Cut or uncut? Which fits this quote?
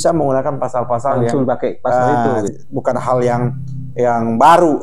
cut